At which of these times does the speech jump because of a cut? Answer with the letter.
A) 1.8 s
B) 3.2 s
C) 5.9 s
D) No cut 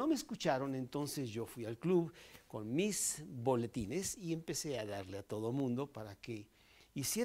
D